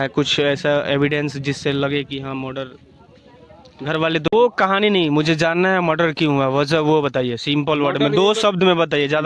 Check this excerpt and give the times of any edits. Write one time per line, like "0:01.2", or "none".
0:04.3